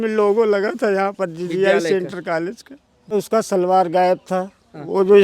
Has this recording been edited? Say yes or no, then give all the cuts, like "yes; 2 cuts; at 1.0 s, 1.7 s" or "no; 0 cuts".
yes; 1 cut; at 3.1 s